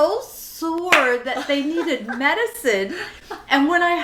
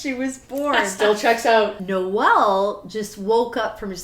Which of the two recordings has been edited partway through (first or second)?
second